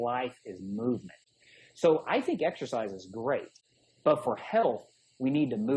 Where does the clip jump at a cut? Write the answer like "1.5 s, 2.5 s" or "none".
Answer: 3.5 s

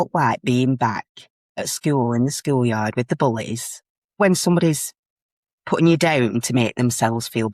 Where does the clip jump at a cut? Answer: 4.2 s

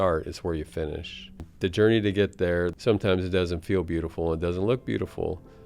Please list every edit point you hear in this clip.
1.5 s, 2.7 s

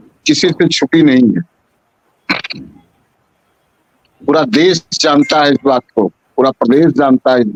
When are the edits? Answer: none

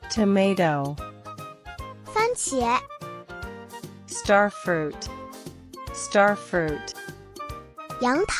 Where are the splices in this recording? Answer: none

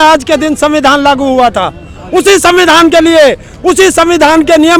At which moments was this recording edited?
none

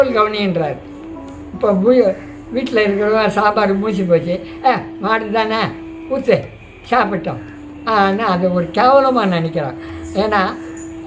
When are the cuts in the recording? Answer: none

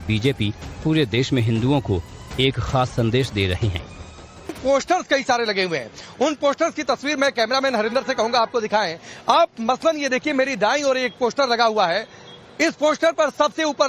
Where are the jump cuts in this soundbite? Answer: 8.3 s

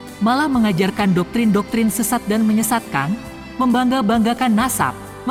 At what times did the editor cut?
none

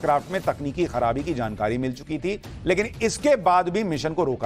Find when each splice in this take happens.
3.2 s

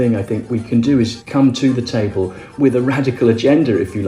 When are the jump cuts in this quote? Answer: 1.2 s

